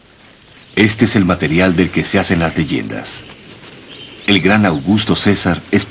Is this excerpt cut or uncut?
uncut